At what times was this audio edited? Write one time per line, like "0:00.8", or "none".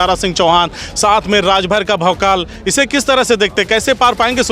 none